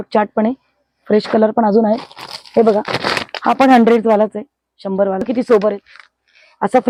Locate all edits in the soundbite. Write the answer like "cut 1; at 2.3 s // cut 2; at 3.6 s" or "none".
none